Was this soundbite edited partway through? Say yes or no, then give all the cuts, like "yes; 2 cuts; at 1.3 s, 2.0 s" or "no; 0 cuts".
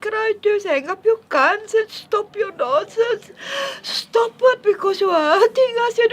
yes; 1 cut; at 4.6 s